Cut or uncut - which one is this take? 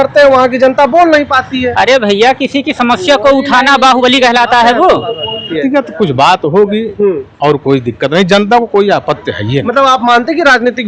cut